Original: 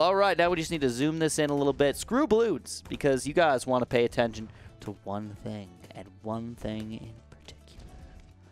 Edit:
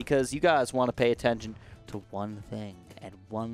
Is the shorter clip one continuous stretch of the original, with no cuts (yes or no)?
yes